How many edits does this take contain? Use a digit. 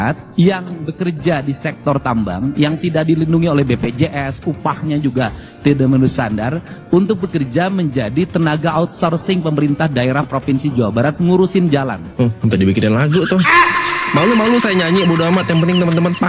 1